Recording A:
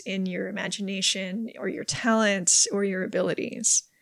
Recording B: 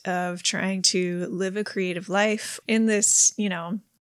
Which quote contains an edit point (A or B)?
B